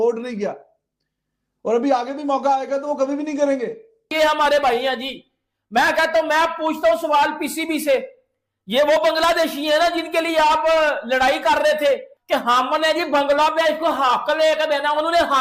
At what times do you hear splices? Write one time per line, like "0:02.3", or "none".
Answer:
0:04.0
0:12.1